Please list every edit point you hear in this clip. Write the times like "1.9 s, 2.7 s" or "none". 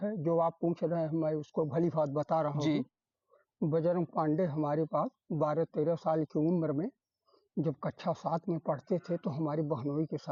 none